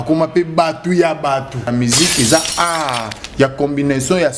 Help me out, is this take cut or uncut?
cut